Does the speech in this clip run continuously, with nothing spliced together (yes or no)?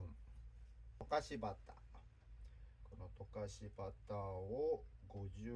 no